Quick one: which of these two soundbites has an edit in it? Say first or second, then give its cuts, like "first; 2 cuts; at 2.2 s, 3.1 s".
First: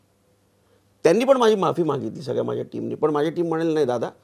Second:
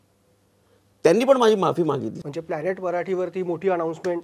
second; 1 cut; at 2.2 s